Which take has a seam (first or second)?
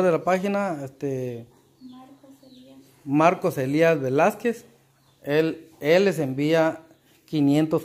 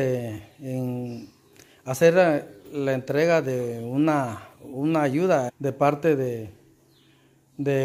second